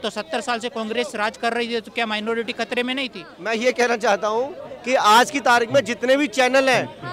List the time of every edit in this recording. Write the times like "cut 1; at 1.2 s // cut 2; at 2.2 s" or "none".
cut 1; at 3.4 s

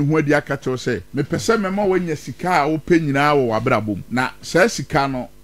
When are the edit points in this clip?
cut 1; at 1.1 s // cut 2; at 4.0 s

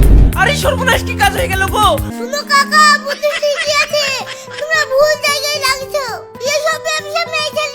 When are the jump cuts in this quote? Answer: cut 1; at 2.1 s // cut 2; at 6.3 s

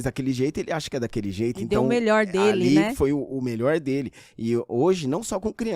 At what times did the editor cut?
none

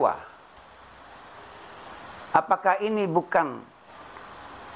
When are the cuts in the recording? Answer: cut 1; at 3.9 s

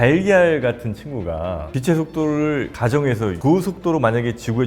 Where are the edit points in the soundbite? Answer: cut 1; at 1.7 s

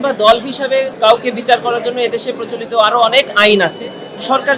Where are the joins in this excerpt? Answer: cut 1; at 0.9 s

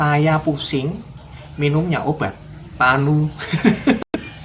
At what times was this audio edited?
none

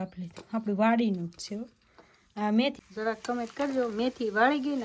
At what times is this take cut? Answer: cut 1; at 2.7 s

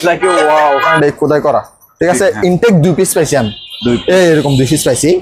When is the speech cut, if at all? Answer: cut 1; at 0.9 s

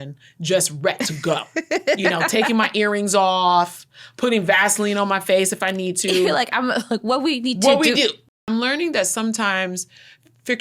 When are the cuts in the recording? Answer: cut 1; at 8.2 s

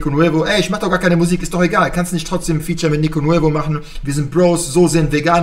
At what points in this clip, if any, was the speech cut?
none

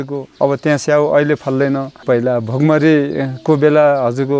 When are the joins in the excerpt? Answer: cut 1; at 1.9 s

